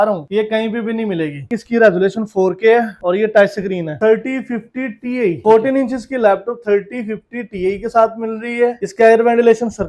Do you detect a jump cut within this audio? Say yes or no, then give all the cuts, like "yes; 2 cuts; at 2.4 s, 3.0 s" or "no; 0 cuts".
yes; 3 cuts; at 1.5 s, 4.0 s, 5.4 s